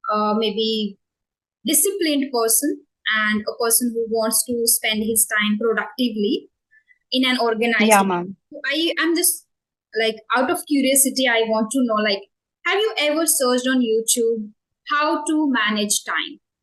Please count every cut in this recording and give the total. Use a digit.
0